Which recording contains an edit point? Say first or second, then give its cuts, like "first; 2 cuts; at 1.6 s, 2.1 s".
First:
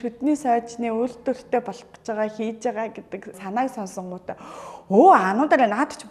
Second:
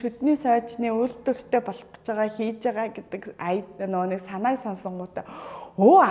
first; 1 cut; at 3.4 s